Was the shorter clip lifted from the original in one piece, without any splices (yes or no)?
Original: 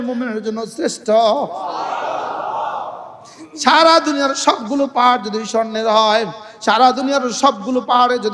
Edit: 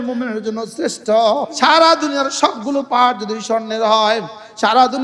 no